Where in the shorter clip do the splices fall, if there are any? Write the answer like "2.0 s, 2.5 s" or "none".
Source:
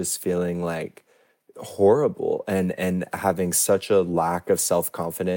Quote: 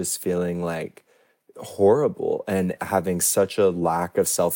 2.7 s